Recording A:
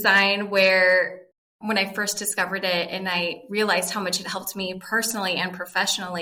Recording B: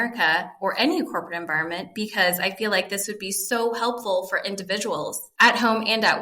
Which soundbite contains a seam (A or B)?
B